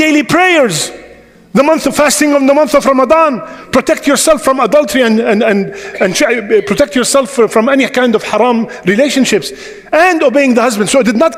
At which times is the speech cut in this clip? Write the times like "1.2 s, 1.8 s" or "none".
none